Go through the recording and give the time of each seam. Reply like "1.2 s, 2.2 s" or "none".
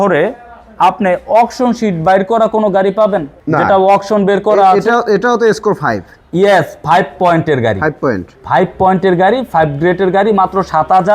3.3 s